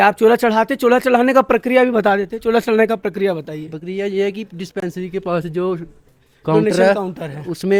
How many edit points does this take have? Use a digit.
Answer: 0